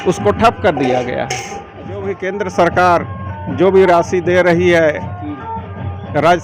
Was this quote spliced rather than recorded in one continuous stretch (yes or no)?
yes